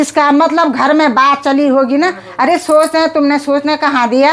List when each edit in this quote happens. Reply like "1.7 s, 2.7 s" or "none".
none